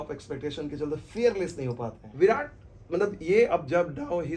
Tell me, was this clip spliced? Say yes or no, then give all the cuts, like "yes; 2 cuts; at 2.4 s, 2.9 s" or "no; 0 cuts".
yes; 1 cut; at 2.0 s